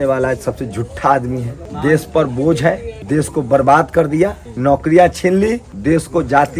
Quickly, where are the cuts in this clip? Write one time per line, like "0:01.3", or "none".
0:01.6
0:02.9
0:04.5
0:05.7